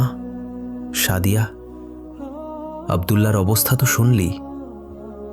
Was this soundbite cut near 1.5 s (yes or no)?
yes